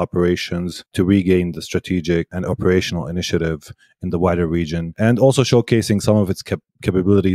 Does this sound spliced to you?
yes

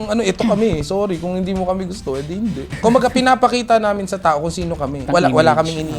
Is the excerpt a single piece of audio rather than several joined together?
no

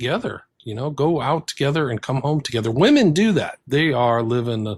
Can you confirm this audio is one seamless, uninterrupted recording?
yes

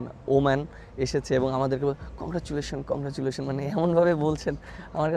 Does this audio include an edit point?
no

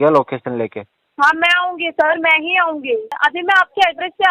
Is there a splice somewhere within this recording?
yes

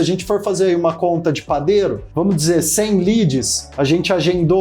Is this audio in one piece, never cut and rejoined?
no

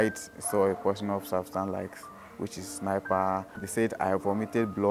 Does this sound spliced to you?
no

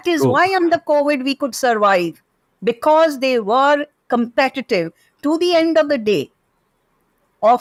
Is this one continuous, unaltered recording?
yes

